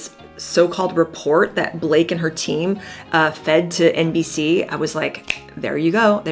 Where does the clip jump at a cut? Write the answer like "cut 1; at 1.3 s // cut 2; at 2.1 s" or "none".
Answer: none